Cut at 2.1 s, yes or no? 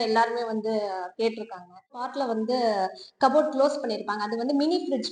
yes